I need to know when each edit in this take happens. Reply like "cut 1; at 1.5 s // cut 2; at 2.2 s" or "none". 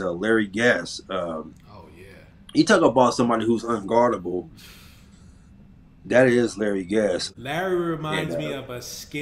cut 1; at 7.3 s